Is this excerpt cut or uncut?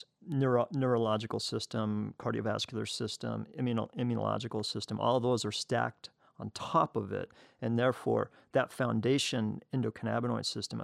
cut